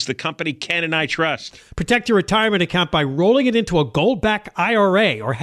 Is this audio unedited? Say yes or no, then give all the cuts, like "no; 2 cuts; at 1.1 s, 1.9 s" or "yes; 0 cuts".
yes; 0 cuts